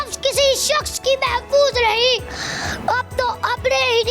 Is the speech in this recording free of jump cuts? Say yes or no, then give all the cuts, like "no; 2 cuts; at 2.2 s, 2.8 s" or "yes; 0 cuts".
yes; 0 cuts